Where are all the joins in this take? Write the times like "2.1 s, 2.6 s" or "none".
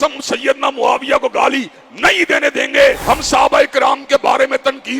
3.0 s